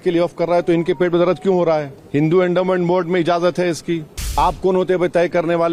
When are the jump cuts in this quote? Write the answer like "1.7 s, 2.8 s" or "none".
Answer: 2.0 s, 4.4 s